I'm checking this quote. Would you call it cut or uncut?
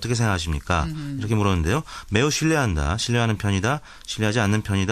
cut